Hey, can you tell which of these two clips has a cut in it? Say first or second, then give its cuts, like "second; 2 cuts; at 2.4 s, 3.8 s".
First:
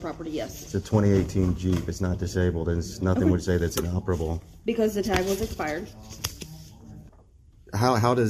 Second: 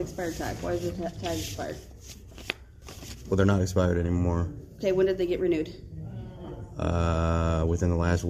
first; 1 cut; at 7.1 s